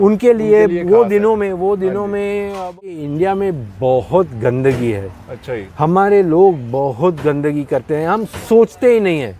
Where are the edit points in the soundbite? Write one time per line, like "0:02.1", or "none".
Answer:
0:02.8